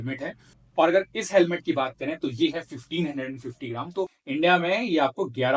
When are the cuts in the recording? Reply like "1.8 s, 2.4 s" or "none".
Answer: 4.2 s